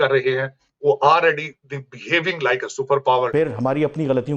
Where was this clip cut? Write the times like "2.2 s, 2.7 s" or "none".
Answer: 3.3 s

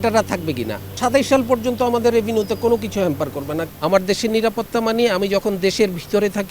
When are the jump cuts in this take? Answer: 1.0 s, 3.6 s

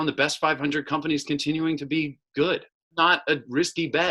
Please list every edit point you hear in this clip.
2.9 s

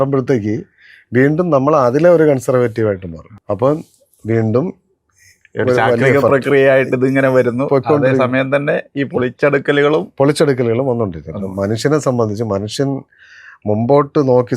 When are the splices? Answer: none

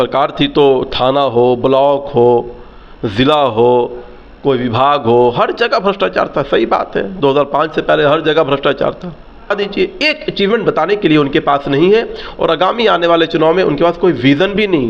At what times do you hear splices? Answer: 9.5 s

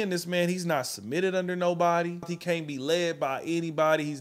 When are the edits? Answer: 2.3 s

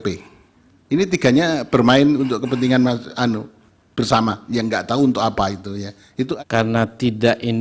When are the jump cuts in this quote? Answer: 6.3 s

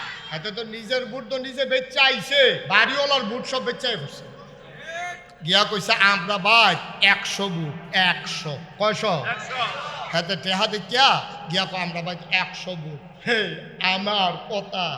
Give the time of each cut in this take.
2.6 s, 5.3 s

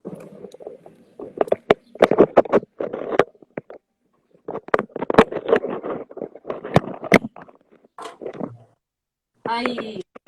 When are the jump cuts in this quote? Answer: 5.4 s

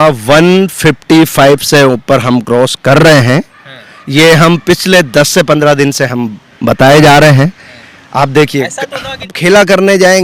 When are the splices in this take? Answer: 9.3 s

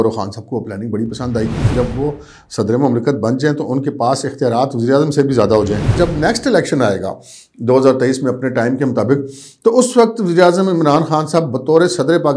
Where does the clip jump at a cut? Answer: 1.7 s, 5.9 s

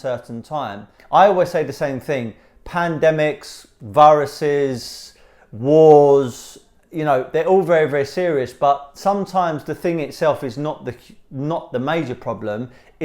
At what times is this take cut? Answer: 0.9 s

